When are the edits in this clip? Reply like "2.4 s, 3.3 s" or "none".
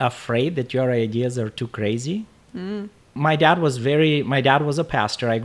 3.0 s